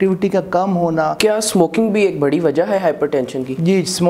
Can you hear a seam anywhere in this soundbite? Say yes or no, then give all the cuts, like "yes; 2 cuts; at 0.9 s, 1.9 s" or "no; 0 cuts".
yes; 1 cut; at 1.2 s